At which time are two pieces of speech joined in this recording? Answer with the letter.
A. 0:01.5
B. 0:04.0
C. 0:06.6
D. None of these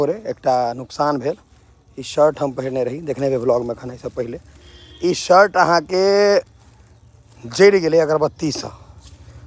D